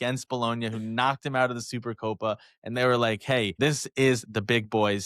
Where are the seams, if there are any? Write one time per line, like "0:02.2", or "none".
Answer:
0:03.5